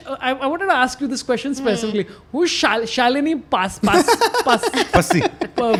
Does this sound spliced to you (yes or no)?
no